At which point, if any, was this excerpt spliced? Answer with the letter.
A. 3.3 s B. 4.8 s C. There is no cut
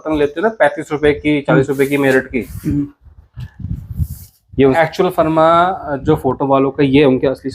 B